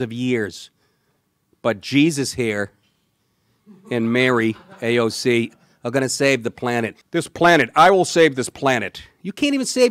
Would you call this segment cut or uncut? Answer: cut